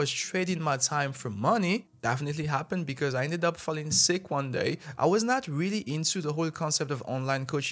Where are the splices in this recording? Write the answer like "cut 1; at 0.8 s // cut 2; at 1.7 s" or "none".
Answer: cut 1; at 1.9 s // cut 2; at 4.9 s